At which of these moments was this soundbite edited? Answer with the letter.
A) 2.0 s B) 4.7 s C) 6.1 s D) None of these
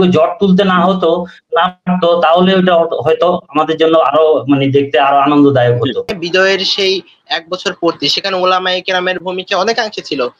C